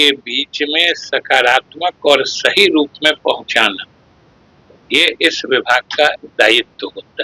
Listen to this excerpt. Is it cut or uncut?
uncut